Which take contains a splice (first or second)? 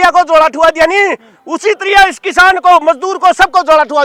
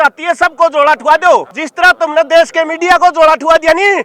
second